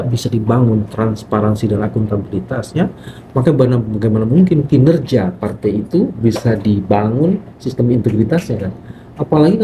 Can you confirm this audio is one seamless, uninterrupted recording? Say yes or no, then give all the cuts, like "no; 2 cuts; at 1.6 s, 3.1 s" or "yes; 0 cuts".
yes; 0 cuts